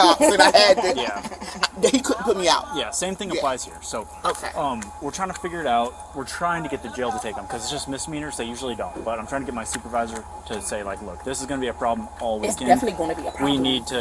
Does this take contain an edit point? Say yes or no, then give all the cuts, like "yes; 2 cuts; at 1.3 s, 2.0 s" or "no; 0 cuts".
no; 0 cuts